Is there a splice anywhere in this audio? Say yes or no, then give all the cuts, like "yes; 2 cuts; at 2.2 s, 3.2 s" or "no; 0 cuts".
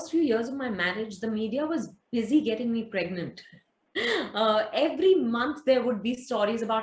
no; 0 cuts